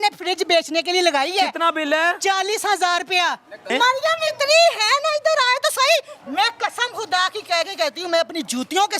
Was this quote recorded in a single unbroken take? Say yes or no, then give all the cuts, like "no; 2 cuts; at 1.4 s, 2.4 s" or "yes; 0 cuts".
no; 1 cut; at 3.7 s